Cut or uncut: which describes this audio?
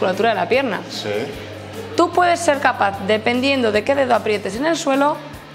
uncut